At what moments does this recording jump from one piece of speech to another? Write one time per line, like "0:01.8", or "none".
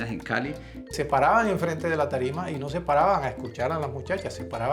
0:00.9